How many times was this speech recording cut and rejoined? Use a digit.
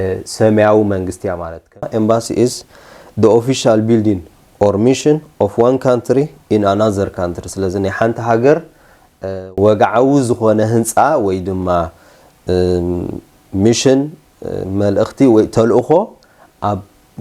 1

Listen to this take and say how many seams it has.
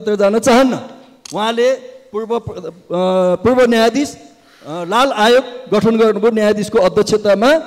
0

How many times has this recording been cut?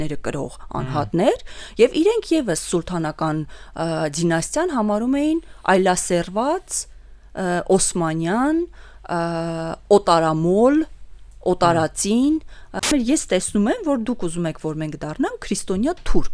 1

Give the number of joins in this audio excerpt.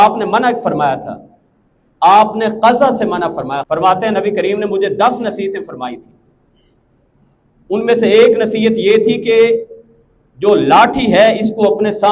1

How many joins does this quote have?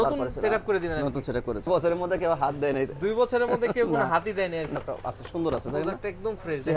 2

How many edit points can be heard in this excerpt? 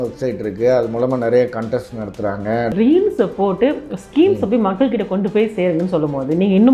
1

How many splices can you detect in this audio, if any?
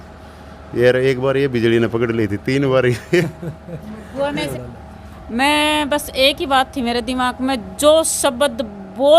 1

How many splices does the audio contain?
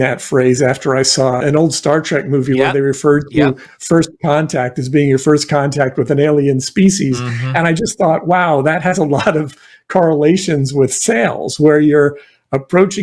1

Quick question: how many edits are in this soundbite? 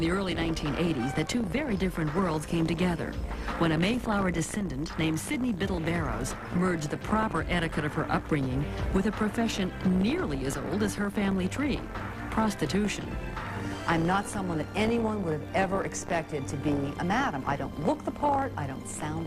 1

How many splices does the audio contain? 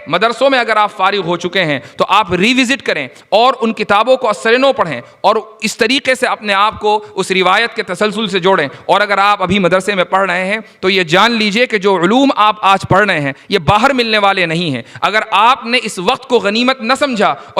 0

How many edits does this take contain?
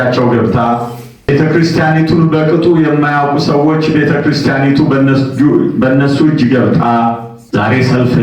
2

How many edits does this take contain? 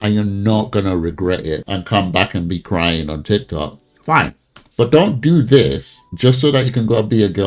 0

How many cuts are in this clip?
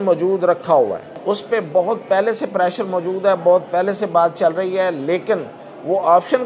1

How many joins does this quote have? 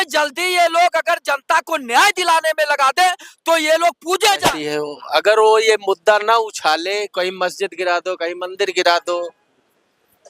1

